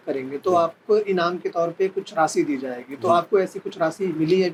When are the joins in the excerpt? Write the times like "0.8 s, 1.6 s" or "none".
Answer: none

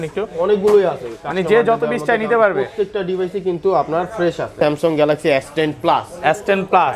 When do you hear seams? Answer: 4.6 s

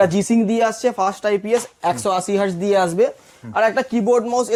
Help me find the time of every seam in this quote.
none

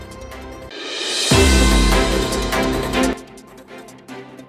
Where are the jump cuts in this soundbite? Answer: 0.7 s, 3.1 s

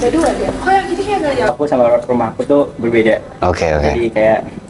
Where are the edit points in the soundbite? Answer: 1.5 s

